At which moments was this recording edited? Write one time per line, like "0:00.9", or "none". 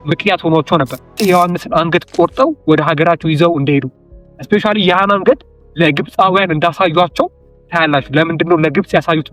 0:01.2